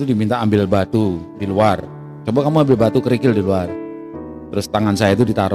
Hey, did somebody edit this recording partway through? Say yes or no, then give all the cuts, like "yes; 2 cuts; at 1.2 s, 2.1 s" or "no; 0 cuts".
no; 0 cuts